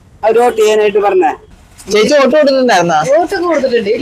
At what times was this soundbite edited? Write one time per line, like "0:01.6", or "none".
0:01.4